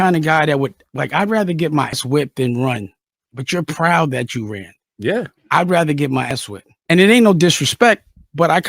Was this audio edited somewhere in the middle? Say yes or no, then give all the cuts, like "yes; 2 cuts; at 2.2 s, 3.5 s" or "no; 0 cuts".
yes; 2 cuts; at 1.9 s, 6.3 s